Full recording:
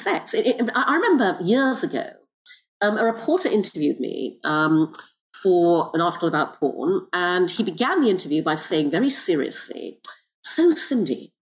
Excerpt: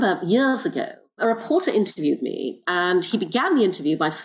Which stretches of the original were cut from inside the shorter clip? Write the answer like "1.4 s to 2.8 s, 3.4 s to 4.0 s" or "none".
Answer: 2.4 s to 3.0 s, 4.4 s to 7.1 s